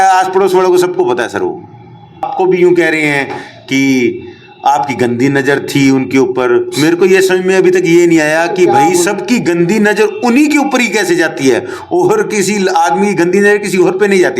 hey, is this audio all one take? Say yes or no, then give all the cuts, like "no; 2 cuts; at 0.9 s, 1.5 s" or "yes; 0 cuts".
no; 1 cut; at 2.3 s